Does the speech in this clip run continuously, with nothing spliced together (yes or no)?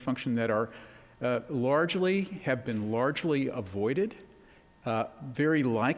no